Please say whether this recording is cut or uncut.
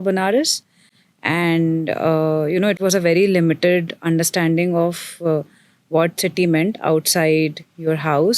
uncut